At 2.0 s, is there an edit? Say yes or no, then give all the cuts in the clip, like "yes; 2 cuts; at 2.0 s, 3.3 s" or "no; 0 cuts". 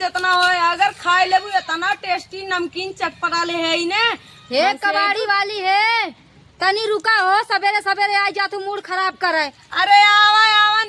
yes; 1 cut; at 2.0 s